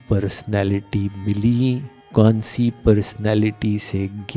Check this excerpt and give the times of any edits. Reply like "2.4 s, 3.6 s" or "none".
1.9 s